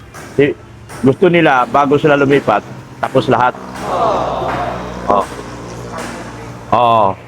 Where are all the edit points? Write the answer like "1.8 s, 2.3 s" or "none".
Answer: 3.7 s, 4.9 s